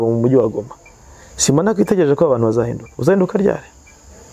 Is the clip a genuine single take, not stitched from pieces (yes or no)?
yes